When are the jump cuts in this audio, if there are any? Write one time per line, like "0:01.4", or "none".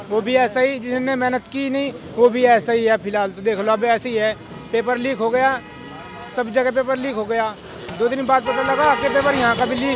none